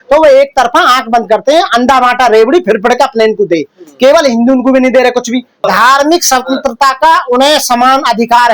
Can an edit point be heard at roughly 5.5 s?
yes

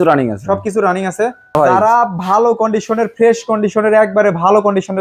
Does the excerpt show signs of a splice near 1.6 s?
yes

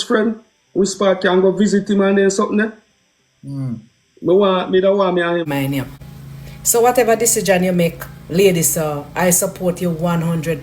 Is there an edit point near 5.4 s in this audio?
yes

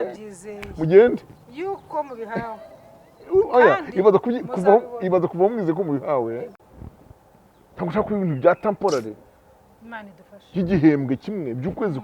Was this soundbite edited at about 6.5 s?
yes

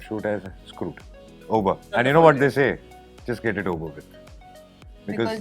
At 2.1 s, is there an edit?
yes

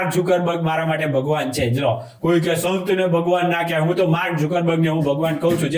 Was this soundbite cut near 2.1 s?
no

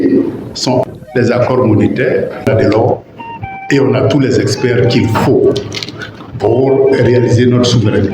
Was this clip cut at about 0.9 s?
yes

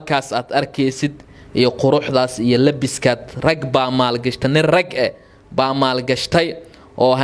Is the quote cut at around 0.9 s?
no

